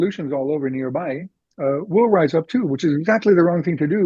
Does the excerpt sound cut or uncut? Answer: uncut